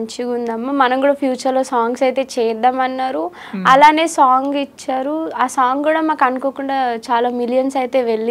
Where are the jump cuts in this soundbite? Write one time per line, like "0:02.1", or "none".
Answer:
none